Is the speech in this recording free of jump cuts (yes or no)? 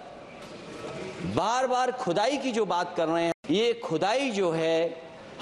no